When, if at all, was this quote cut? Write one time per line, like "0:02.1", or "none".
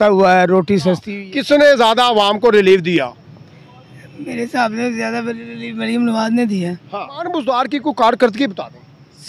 0:01.1
0:07.2